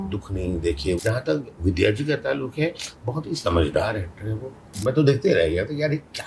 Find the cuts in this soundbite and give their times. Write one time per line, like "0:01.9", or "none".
0:01.0
0:04.8